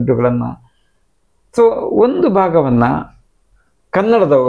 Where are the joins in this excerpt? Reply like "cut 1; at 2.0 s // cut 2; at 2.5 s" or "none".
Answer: none